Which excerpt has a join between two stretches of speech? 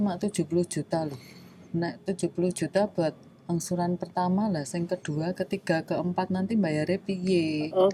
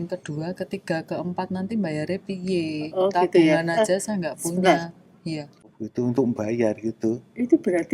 second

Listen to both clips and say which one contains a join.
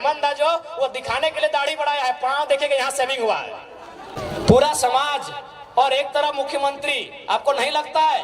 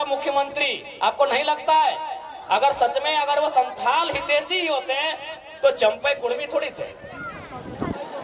first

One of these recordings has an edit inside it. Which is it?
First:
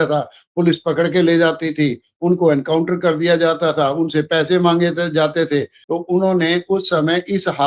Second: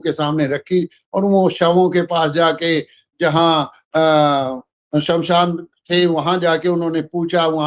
first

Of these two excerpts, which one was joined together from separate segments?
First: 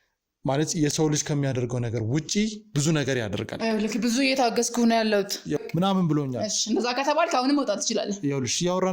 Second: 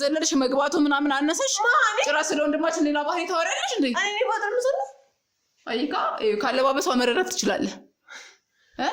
first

